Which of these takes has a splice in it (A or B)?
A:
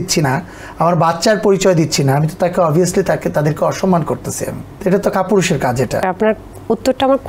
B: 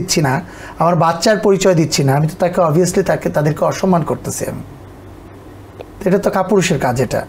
A